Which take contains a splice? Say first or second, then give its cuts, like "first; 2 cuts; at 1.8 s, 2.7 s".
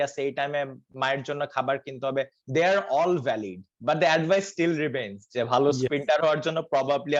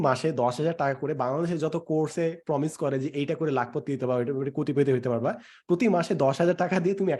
first; 1 cut; at 3.7 s